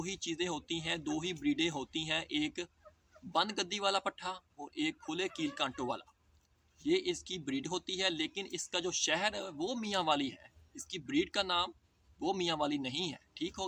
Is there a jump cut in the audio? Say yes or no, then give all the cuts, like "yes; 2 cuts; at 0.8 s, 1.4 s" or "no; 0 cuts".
no; 0 cuts